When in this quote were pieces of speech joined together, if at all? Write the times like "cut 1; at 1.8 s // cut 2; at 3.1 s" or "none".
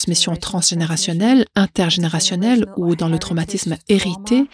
none